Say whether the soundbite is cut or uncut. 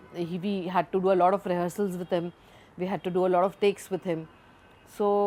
uncut